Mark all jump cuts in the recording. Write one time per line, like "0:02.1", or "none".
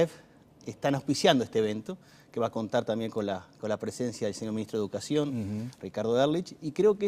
0:04.2